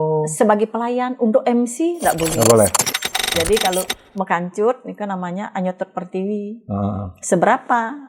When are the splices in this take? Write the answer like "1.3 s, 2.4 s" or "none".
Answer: 3.1 s